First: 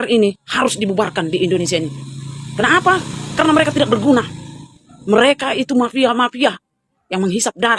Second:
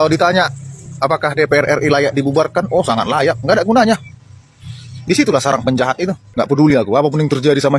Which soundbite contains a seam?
second; 1 cut; at 6.2 s

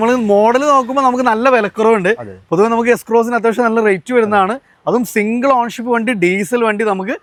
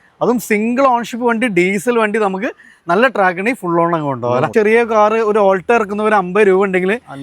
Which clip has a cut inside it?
second; 1 cut; at 4.5 s

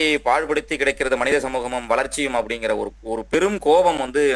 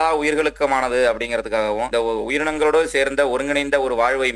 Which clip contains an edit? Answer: second; 1 cut; at 1.9 s

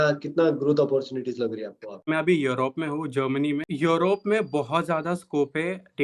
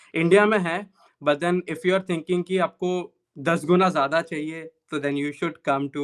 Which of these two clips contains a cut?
first; 2 cuts; at 2.1 s, 3.7 s

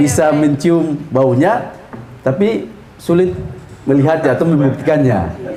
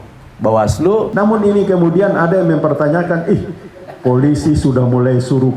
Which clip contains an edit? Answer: second; 1 cut; at 1.1 s

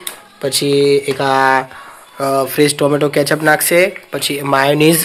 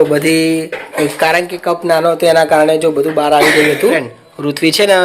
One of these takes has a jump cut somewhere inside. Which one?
second; 1 cut; at 4.1 s

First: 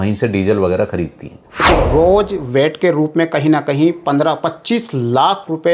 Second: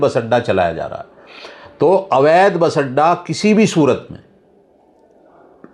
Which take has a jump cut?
first; 1 cut; at 1.6 s

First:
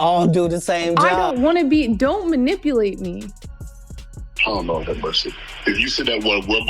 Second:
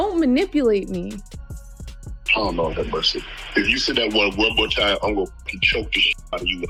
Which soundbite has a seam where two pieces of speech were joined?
first; 1 cut; at 1.1 s

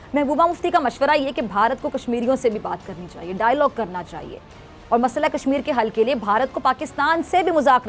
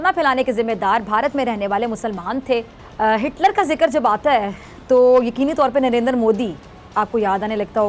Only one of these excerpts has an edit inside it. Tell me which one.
second; 1 cut; at 2.8 s

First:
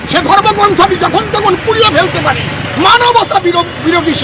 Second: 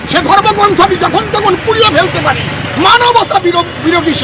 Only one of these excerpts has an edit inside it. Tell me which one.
second; 1 cut; at 3.2 s

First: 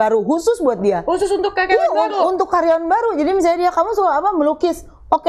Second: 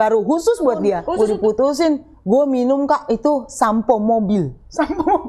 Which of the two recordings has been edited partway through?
second; 1 cut; at 1.1 s

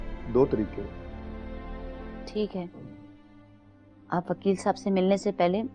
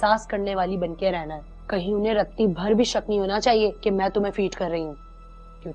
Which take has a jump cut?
first; 1 cut; at 2.2 s

